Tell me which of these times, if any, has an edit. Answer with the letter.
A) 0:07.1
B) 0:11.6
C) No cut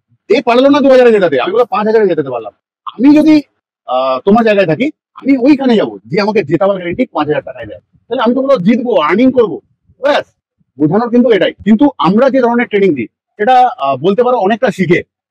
B